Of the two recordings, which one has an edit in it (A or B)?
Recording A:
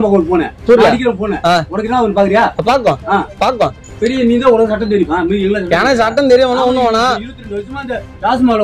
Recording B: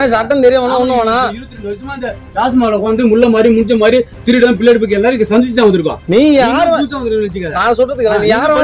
A